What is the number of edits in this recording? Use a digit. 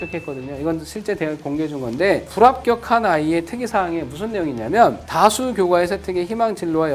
0